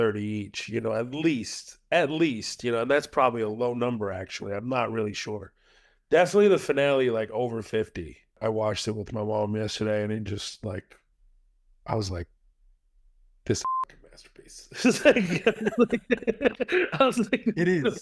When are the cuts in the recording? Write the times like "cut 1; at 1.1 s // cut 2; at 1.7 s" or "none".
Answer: cut 1; at 8.4 s